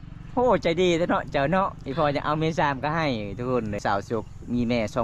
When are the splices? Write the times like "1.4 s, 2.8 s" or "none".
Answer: 3.8 s